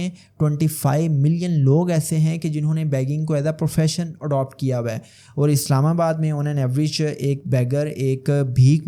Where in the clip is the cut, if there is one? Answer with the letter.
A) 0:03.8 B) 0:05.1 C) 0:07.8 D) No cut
D